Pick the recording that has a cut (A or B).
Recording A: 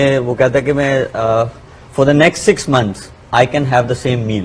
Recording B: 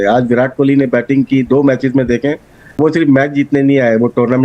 B